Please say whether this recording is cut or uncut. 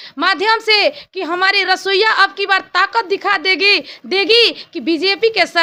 uncut